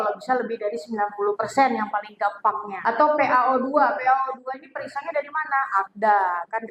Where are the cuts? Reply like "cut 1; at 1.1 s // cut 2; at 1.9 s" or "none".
cut 1; at 2.7 s